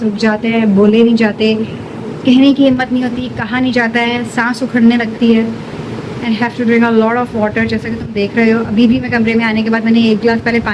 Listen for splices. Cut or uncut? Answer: uncut